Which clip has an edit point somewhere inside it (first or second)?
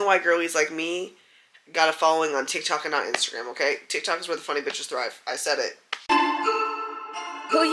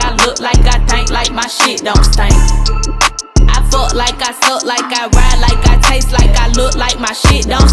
first